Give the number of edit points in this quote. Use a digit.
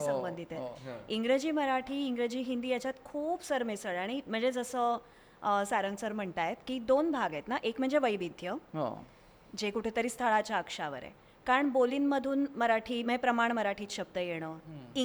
0